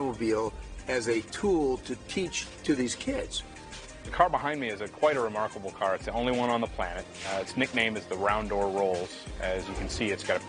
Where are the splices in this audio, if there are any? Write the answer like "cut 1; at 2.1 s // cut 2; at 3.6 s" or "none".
cut 1; at 2.5 s // cut 2; at 3.4 s

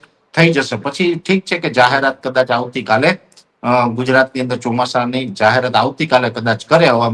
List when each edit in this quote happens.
none

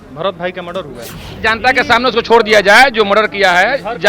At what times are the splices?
cut 1; at 1.4 s

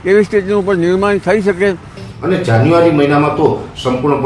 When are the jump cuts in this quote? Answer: cut 1; at 2.0 s

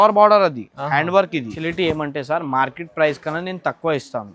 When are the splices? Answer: cut 1; at 1.6 s

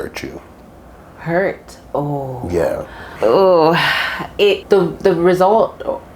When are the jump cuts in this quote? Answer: cut 1; at 3.0 s // cut 2; at 4.6 s

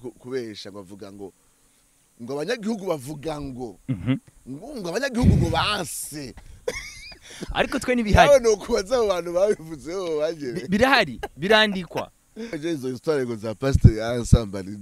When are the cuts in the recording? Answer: cut 1; at 12.3 s

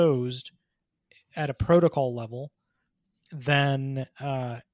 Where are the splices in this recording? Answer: none

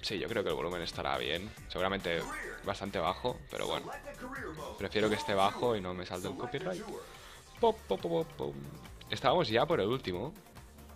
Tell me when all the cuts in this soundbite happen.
cut 1; at 6.6 s

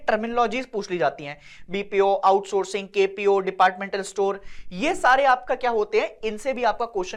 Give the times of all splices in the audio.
none

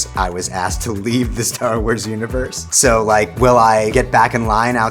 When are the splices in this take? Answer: cut 1; at 3.9 s

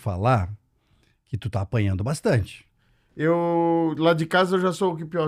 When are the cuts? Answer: none

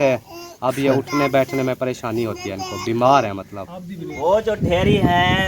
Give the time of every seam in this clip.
cut 1; at 4.1 s

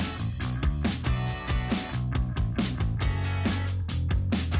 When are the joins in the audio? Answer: cut 1; at 2.3 s

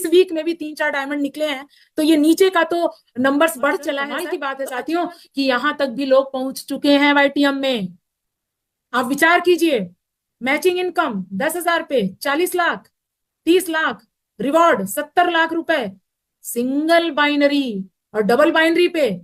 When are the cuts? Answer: cut 1; at 4.1 s

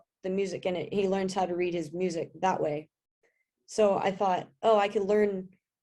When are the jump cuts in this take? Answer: none

